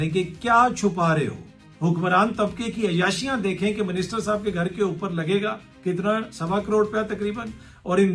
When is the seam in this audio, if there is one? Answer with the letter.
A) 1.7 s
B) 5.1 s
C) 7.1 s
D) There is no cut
A